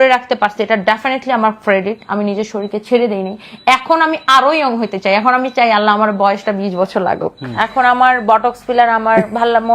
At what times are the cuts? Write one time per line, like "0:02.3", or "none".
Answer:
0:07.4

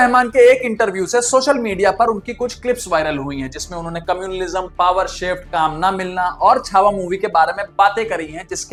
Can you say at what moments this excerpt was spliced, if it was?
none

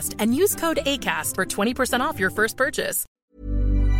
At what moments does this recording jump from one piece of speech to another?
0:03.0

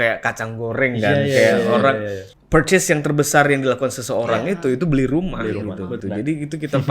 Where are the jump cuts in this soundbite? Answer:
0:02.3
0:06.0

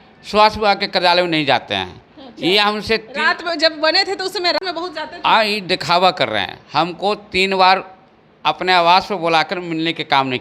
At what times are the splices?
none

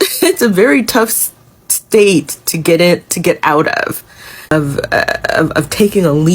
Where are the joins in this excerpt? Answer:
0:04.5

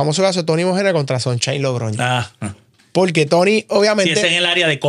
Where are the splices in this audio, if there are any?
none

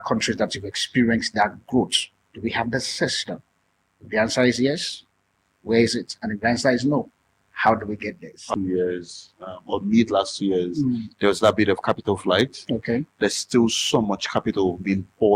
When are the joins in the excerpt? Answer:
0:08.4

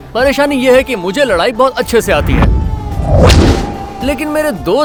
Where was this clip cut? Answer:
none

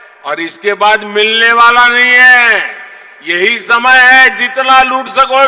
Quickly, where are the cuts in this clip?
none

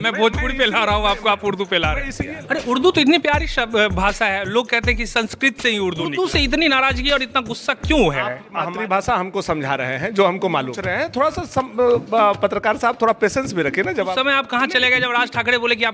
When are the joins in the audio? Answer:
0:02.2
0:06.1
0:08.7
0:10.9
0:14.1

